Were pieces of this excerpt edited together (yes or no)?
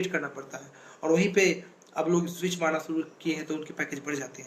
no